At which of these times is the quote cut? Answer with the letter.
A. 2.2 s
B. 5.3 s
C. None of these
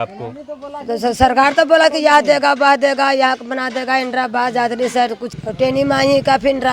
B